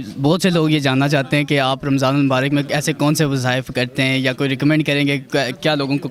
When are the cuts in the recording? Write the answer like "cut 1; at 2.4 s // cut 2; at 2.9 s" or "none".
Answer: none